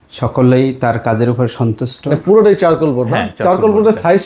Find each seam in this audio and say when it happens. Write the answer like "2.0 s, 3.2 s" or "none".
2.2 s